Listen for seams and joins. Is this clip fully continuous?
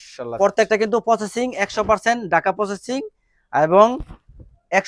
yes; 0 cuts

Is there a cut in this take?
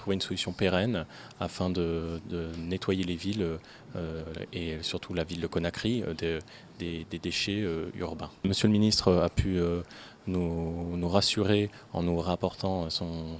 yes; 1 cut; at 8.4 s

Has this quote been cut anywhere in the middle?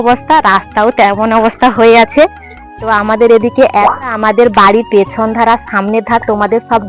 yes; 1 cut; at 3.9 s

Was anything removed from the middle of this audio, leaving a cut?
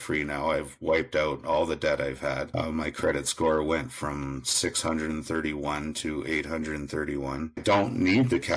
yes; 2 cuts; at 2.5 s, 7.6 s

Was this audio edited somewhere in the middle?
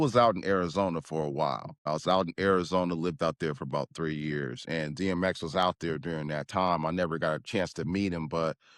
yes; 1 cut; at 1.7 s

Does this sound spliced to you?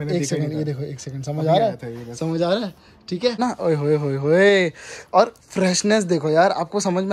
yes; 1 cut; at 3.4 s

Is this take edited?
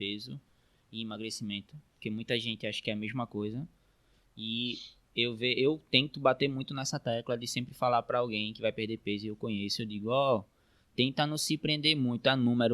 no; 0 cuts

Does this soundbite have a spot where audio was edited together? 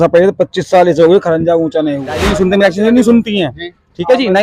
yes; 1 cut; at 2.3 s

